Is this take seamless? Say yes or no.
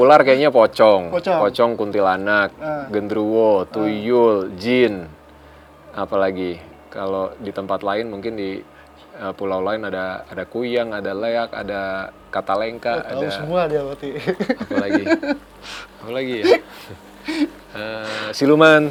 yes